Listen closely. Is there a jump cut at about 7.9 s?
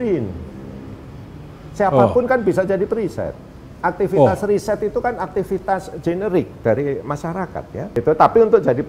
yes; 1 cut; at 7.9 s

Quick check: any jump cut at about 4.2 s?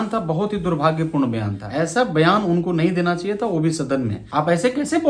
yes; 2 cuts; at 1.6 s, 4.2 s

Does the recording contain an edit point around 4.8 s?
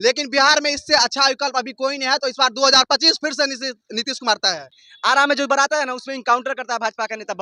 yes; 1 cut; at 4.8 s

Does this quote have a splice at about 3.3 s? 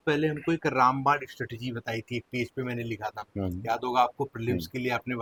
no; 0 cuts

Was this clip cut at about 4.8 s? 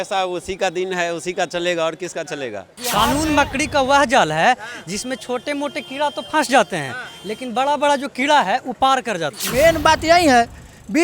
no; 2 cuts; at 2.8 s, 9.4 s

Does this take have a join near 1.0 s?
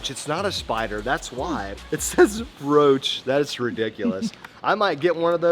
no; 0 cuts

